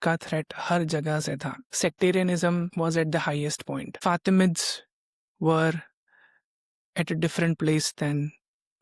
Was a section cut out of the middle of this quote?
yes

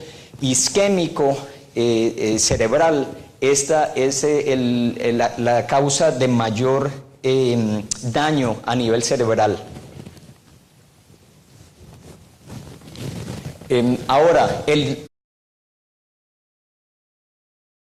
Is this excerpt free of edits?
yes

